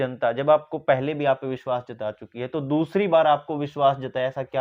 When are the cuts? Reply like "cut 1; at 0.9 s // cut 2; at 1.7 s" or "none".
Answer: none